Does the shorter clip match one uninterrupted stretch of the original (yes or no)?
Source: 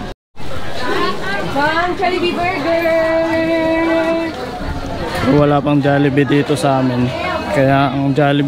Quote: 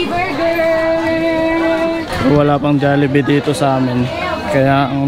no